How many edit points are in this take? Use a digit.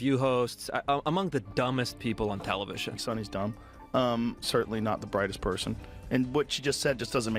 0